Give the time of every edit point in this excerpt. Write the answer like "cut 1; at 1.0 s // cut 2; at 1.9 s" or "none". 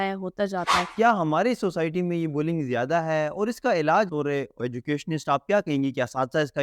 cut 1; at 0.9 s // cut 2; at 4.6 s